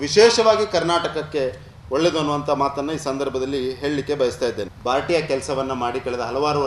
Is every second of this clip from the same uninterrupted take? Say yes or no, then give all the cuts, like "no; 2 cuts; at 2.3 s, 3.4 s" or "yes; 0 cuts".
no; 1 cut; at 4.7 s